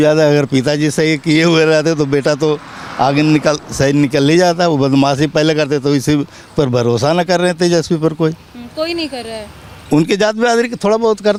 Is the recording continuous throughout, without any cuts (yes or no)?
yes